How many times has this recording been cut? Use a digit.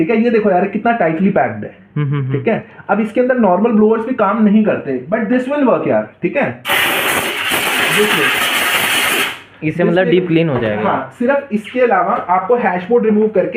0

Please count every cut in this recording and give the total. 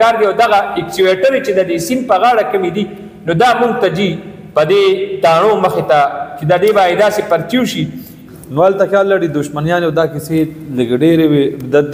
1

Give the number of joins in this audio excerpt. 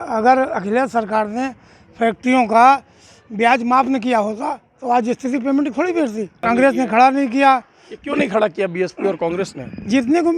1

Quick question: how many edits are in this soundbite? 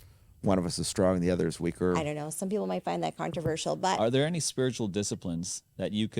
2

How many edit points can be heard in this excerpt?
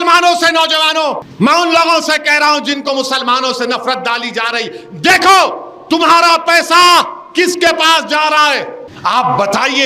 2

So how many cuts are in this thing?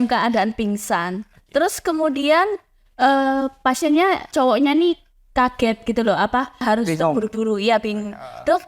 2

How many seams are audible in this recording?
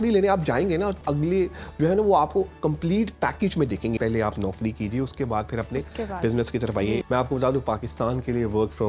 3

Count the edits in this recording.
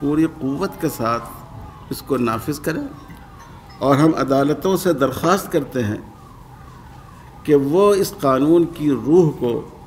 0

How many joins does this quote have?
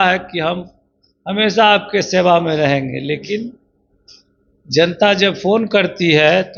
0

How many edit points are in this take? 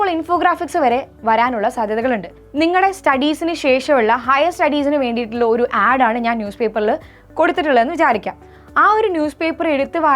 1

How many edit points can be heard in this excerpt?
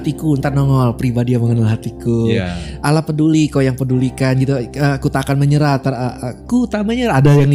0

